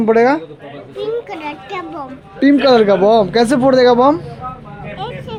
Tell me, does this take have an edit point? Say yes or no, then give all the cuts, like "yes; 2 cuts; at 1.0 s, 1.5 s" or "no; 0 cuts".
no; 0 cuts